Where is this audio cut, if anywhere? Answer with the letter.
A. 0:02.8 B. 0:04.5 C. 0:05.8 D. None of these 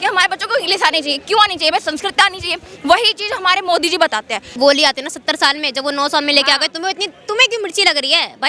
B